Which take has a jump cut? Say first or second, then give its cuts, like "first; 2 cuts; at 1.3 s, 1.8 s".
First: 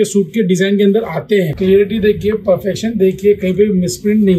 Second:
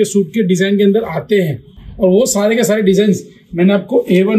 first; 1 cut; at 1.5 s